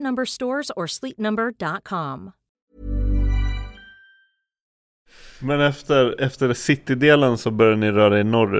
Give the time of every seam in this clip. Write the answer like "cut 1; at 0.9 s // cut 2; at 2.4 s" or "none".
none